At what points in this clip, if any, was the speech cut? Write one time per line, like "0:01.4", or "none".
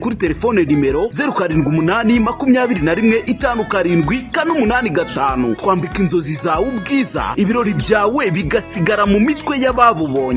none

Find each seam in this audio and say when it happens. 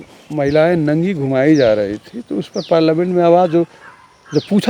none

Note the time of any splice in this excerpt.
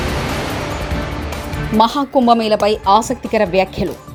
none

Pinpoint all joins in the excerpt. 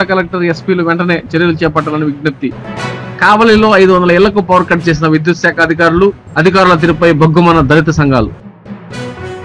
0:08.4

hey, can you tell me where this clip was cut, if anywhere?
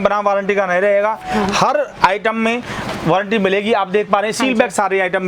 none

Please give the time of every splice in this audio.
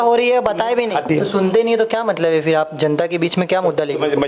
0:01.0

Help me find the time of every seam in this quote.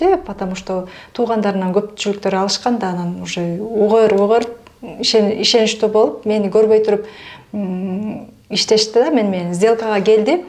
none

